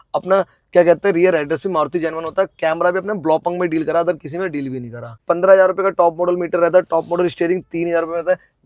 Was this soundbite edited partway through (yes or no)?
yes